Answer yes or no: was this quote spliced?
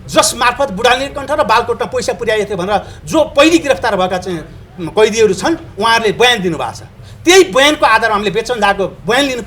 no